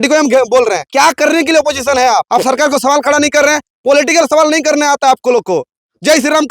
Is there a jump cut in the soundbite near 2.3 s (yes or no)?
yes